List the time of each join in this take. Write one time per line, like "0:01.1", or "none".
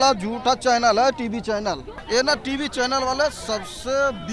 0:01.9